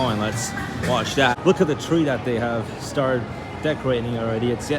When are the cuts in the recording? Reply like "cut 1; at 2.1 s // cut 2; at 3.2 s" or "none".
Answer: cut 1; at 1.4 s